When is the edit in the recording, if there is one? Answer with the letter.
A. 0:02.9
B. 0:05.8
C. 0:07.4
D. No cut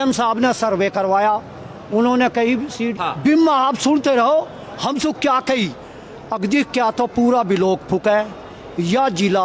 A